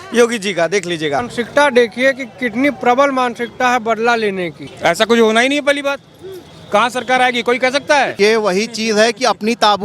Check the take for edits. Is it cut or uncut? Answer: cut